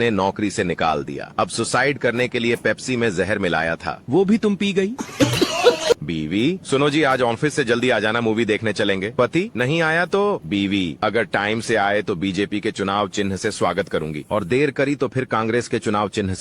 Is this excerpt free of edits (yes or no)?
no